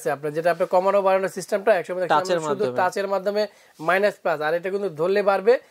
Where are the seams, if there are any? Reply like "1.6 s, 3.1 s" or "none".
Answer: none